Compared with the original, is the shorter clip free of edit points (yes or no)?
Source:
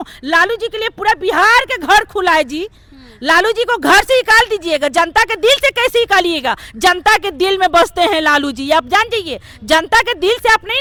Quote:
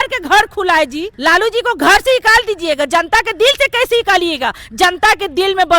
no